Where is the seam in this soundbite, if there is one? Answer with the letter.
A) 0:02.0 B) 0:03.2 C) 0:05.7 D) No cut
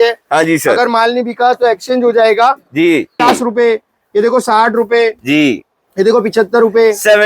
B